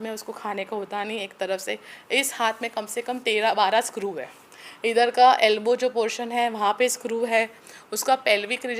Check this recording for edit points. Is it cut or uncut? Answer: uncut